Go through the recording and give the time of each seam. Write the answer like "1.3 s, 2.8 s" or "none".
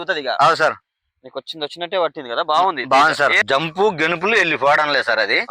3.4 s